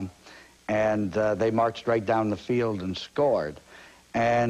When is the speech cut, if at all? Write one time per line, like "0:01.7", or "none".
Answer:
0:02.7